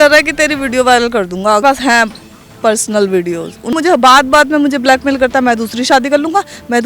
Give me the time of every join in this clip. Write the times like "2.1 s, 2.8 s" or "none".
1.6 s, 3.7 s